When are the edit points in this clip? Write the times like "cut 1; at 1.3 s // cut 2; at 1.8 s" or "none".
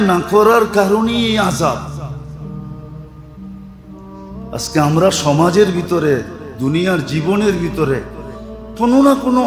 none